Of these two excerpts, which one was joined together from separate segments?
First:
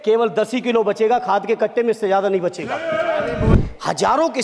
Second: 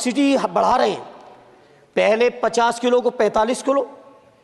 first; 1 cut; at 3.5 s

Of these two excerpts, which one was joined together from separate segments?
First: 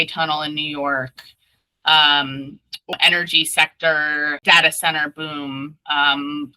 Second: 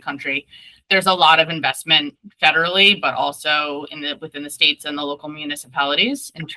first; 2 cuts; at 2.9 s, 4.4 s

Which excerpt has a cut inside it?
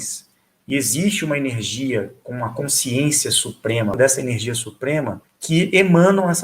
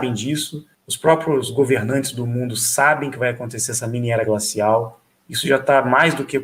first; 2 cuts; at 3.9 s, 5.2 s

